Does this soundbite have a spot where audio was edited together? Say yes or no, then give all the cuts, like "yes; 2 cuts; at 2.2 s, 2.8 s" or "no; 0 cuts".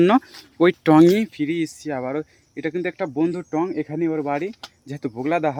no; 0 cuts